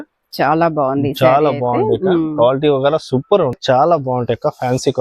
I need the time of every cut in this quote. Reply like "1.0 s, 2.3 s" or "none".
3.6 s